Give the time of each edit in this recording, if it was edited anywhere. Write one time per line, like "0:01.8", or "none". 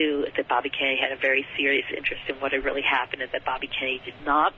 none